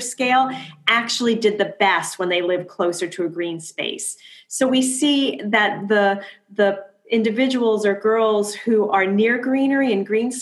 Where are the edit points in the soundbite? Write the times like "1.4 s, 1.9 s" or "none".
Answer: none